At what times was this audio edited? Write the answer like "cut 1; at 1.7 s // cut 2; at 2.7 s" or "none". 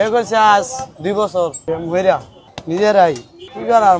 cut 1; at 1.6 s // cut 2; at 2.3 s